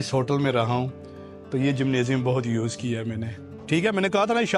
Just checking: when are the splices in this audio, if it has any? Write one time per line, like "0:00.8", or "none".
0:03.5